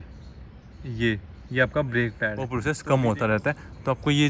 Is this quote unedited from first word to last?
no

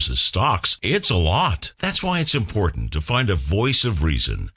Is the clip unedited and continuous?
yes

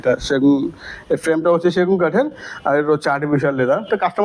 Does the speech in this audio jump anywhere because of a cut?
no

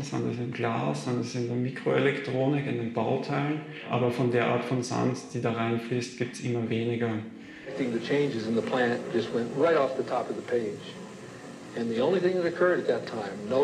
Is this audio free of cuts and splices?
no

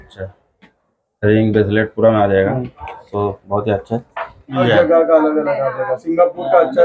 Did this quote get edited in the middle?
yes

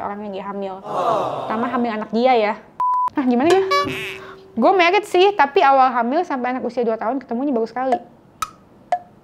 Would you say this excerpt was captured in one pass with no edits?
no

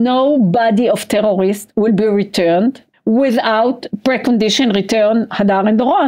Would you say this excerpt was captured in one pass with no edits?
no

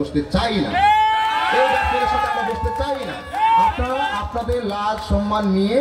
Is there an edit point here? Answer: no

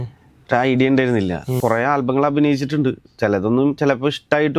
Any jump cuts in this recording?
yes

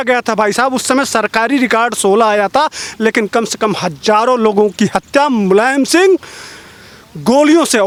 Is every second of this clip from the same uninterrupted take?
yes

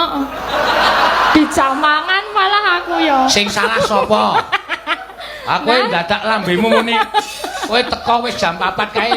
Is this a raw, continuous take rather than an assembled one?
yes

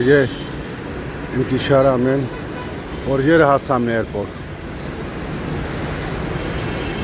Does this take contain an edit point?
no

